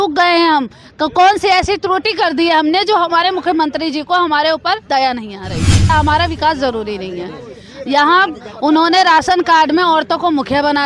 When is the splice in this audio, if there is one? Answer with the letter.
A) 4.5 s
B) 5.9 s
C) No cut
B